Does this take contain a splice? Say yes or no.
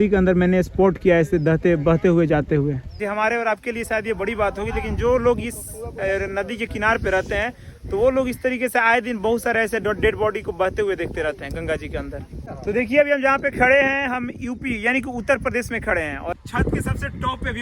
yes